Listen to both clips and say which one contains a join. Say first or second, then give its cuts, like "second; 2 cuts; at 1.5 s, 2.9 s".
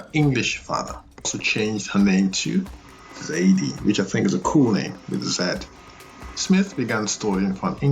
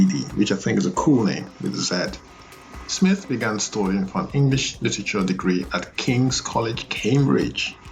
first; 1 cut; at 1.4 s